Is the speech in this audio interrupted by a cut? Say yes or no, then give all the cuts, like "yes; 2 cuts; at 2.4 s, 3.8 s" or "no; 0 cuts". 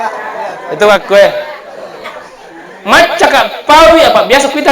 no; 0 cuts